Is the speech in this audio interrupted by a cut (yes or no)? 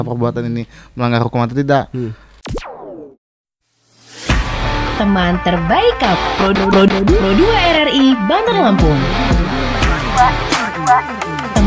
yes